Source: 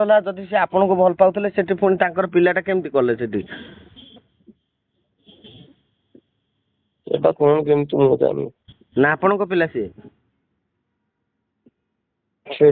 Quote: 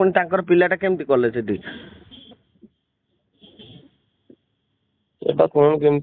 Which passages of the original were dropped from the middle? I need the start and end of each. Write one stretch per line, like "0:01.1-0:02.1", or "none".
none